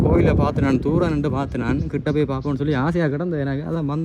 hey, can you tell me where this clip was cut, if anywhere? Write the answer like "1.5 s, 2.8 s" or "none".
none